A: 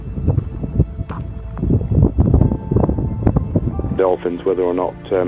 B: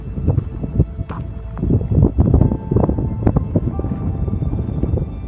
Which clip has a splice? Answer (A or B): B